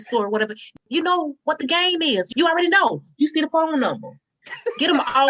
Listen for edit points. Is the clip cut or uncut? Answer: cut